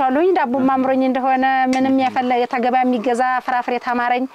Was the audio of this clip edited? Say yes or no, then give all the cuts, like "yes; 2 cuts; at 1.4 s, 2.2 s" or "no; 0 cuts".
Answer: no; 0 cuts